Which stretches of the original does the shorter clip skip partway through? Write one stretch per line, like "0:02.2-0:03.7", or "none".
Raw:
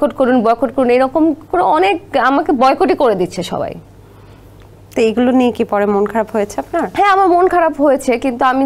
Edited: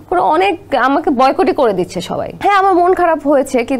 0:03.8-0:06.9